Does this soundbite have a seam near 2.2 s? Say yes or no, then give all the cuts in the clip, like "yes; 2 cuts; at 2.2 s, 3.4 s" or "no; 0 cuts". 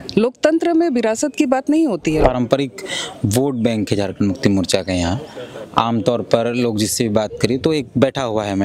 yes; 1 cut; at 2.2 s